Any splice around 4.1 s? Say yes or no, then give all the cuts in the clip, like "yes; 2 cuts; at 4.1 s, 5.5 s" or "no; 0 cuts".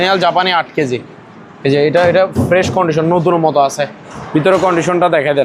no; 0 cuts